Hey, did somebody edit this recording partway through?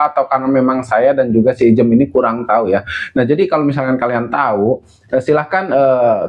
no; 0 cuts

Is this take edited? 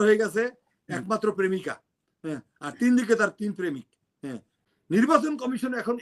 yes; 1 cut; at 4.6 s

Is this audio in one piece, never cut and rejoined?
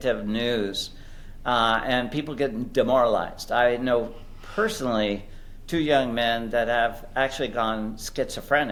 yes; 0 cuts

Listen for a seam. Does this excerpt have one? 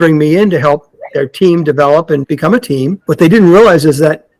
yes; 1 cut; at 2.4 s

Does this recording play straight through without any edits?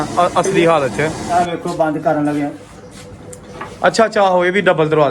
no; 1 cut; at 1.2 s

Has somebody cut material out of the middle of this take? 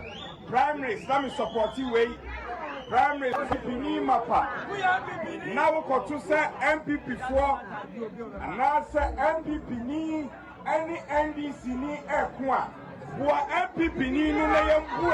no; 0 cuts

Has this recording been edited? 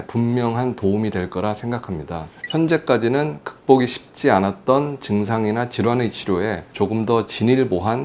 yes; 1 cut; at 2.4 s

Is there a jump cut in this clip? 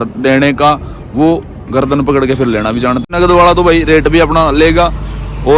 yes; 1 cut; at 3.1 s

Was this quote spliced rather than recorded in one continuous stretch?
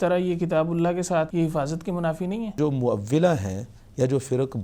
yes; 2 cuts; at 1.3 s, 2.5 s

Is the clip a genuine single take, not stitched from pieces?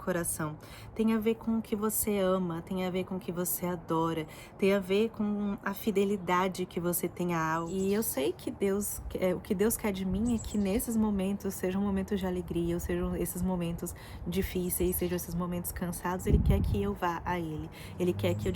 no; 1 cut; at 7.7 s

